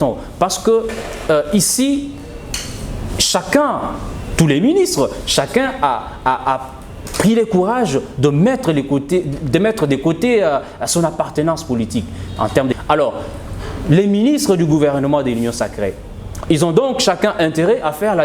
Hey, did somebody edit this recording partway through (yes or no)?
yes